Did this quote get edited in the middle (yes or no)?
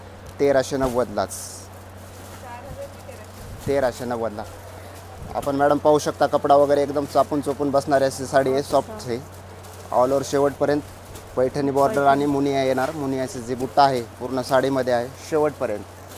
no